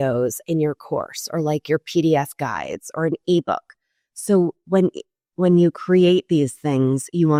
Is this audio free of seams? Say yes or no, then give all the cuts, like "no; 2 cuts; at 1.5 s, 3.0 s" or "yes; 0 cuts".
yes; 0 cuts